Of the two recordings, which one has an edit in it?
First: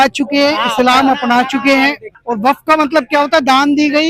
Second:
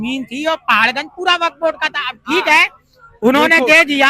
first; 1 cut; at 2.1 s

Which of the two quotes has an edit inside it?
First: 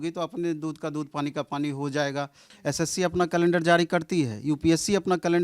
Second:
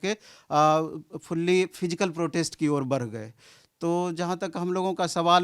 first; 1 cut; at 2.4 s

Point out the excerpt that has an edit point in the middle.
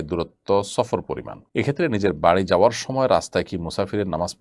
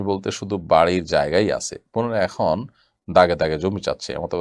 first; 1 cut; at 1.3 s

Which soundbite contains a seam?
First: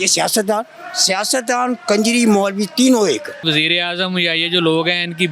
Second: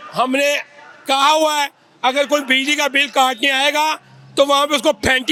first; 1 cut; at 3.4 s

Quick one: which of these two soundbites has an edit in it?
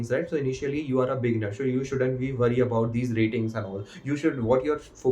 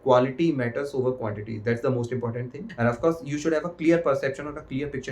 second; 1 cut; at 2.7 s

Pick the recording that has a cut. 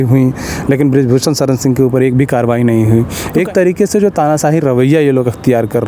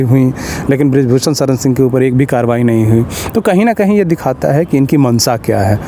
first; 1 cut; at 3.2 s

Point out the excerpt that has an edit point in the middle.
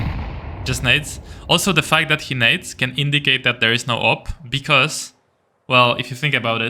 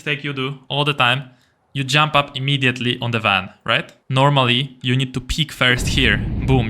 second; 1 cut; at 4.0 s

